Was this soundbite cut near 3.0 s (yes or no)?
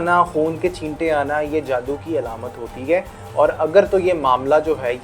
no